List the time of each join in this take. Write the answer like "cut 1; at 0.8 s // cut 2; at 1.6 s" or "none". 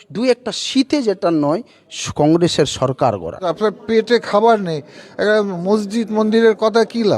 cut 1; at 3.5 s